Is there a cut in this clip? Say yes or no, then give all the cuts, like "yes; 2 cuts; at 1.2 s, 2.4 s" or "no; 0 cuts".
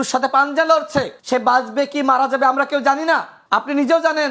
yes; 2 cuts; at 1.2 s, 3.4 s